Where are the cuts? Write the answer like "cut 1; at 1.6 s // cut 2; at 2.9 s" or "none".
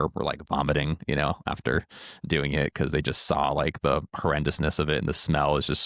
none